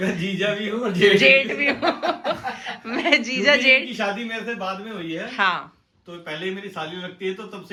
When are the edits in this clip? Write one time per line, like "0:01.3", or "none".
none